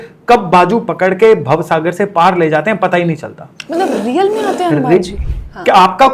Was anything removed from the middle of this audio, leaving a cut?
yes; 1 cut; at 5.1 s

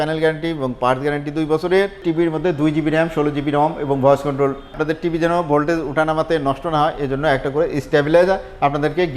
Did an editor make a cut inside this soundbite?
yes; 2 cuts; at 2.0 s, 4.7 s

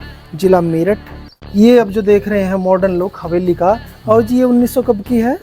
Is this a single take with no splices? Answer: no; 1 cut; at 1.4 s

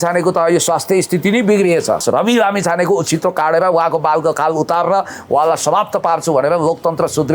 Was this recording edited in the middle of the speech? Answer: yes; 1 cut; at 2.0 s

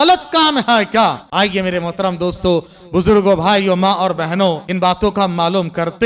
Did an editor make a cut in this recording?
yes; 2 cuts; at 1.2 s, 4.7 s

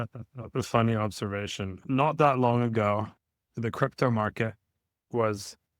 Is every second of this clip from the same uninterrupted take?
no; 1 cut; at 1.7 s

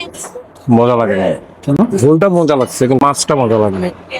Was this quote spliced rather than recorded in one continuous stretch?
yes; 1 cut; at 3.0 s

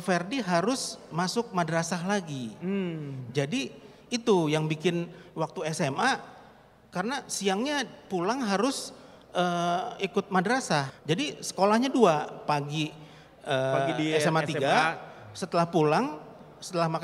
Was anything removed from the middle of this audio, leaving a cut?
yes; 1 cut; at 10.9 s

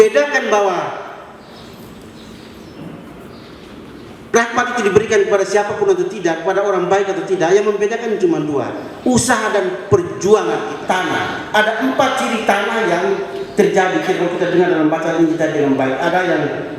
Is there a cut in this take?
yes; 1 cut; at 10.7 s

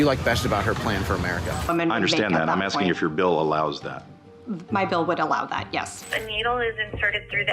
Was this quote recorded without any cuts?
no; 2 cuts; at 1.7 s, 6.0 s

